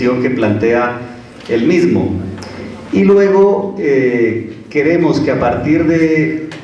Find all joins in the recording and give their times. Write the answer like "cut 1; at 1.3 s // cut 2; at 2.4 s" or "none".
none